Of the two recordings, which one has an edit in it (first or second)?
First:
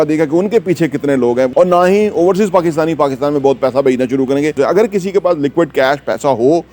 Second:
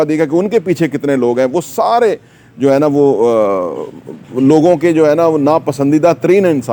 first